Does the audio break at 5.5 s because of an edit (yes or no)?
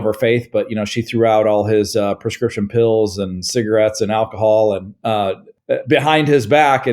yes